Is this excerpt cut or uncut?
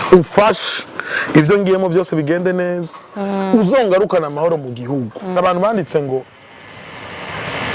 cut